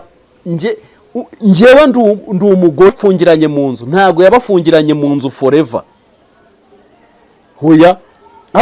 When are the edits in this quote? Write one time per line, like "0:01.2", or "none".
0:03.0